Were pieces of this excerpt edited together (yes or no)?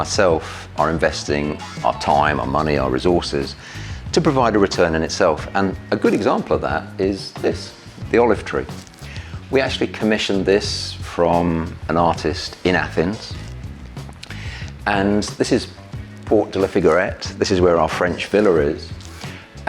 no